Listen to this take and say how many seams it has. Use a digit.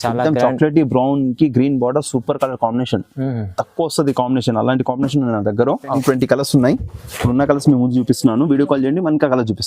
1